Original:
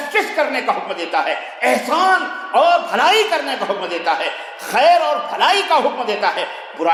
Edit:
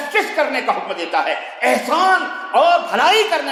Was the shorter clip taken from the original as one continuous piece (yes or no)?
yes